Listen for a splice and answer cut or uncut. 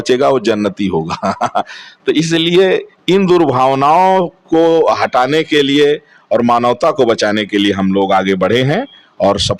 uncut